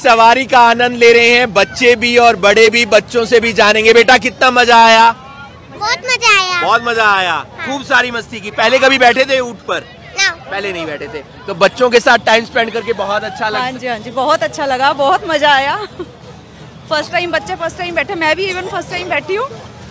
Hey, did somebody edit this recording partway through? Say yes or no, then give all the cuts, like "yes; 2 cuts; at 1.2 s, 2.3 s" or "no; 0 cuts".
no; 0 cuts